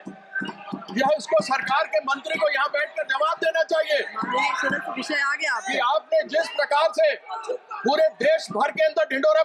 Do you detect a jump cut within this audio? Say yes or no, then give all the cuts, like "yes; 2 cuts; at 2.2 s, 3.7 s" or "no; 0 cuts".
no; 0 cuts